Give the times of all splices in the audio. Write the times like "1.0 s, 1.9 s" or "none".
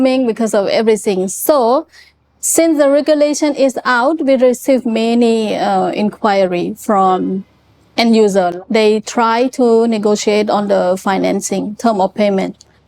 8.5 s